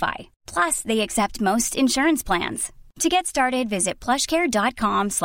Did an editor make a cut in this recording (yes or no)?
no